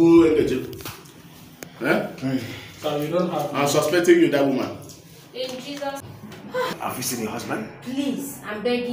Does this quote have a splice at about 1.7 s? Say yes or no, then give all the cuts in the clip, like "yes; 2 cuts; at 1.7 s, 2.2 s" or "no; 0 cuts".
no; 1 cut; at 6.1 s